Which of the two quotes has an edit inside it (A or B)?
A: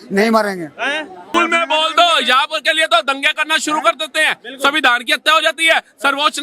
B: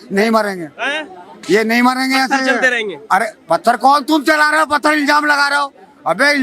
A